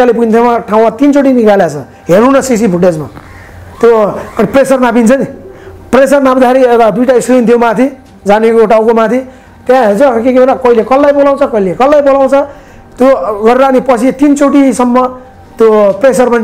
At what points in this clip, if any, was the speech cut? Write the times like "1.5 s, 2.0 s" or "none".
none

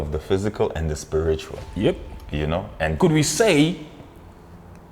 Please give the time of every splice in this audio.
3.0 s

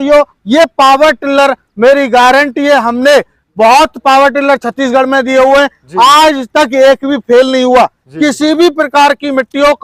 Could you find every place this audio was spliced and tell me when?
none

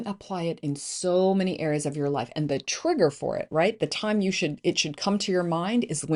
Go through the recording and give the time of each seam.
none

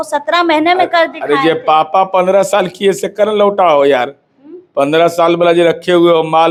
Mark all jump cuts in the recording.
none

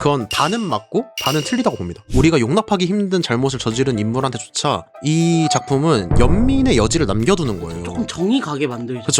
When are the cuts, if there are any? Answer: 2.0 s

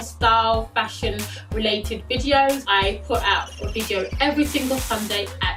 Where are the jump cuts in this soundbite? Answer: none

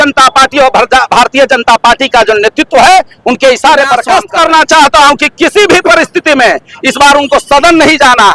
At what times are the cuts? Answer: 4.0 s

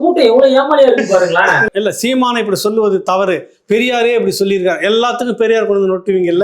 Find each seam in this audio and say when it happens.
1.6 s

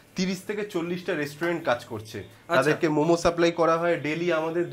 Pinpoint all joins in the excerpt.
none

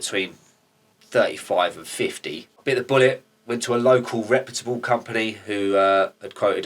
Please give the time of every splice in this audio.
2.5 s

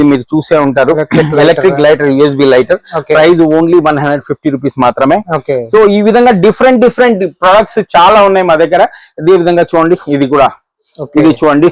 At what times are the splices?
none

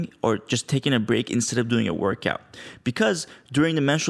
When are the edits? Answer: none

